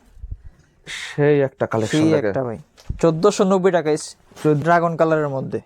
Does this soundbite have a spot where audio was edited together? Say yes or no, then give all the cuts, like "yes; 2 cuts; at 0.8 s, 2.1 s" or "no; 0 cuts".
yes; 1 cut; at 4.6 s